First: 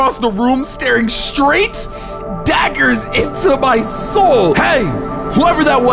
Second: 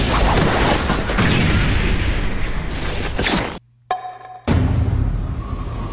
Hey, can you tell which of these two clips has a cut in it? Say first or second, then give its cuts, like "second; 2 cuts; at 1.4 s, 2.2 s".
second; 1 cut; at 4.4 s